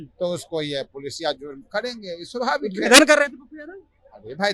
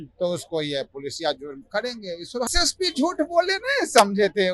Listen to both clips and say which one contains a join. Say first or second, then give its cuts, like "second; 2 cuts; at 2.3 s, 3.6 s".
second; 1 cut; at 2.5 s